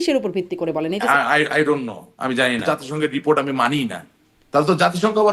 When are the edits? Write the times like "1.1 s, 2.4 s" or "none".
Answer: 1.0 s, 2.6 s